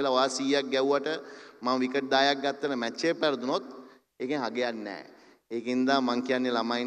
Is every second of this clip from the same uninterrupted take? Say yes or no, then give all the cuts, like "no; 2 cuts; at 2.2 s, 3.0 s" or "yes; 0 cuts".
yes; 0 cuts